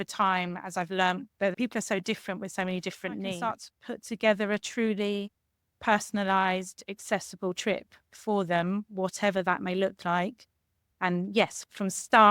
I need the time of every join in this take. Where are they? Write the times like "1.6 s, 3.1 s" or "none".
1.5 s, 3.5 s